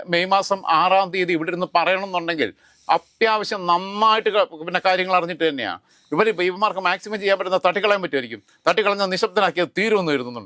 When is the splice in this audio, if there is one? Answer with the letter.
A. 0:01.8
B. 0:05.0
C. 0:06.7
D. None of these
D